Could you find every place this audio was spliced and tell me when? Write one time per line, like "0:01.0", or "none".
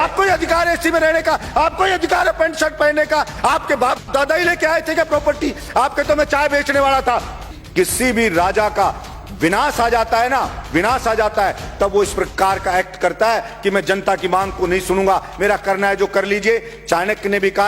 0:07.6